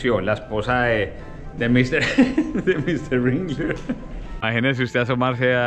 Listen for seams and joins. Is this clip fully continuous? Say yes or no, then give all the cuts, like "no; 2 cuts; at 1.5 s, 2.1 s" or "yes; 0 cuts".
no; 1 cut; at 4.3 s